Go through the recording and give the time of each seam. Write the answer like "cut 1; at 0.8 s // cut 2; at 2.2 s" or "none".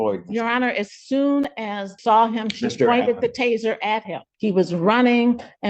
cut 1; at 1.9 s // cut 2; at 4.3 s